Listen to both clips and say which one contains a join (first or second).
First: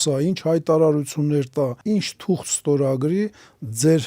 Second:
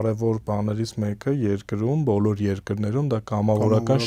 first